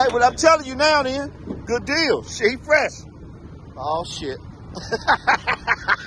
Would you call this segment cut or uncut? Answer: uncut